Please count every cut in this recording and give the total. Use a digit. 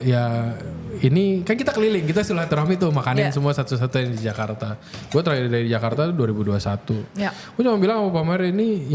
0